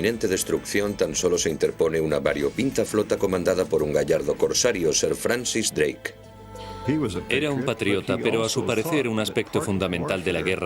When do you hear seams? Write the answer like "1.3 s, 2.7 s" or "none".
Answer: 9.3 s

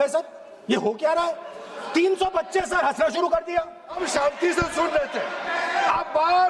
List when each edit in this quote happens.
4.0 s

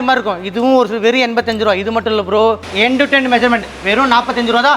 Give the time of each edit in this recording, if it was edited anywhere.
2.6 s

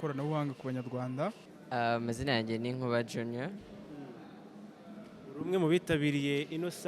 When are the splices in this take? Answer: 1.5 s

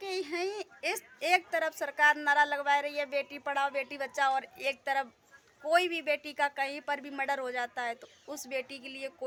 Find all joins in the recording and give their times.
none

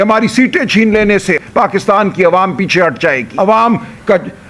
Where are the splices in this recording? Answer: 1.4 s, 3.3 s

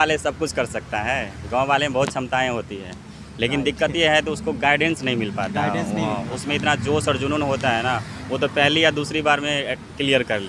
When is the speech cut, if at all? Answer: none

